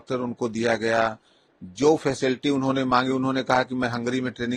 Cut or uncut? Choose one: uncut